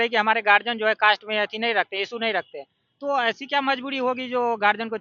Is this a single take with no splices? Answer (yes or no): yes